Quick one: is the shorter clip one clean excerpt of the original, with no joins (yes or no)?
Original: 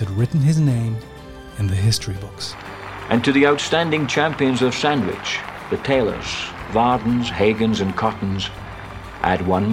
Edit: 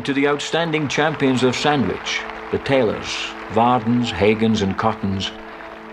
yes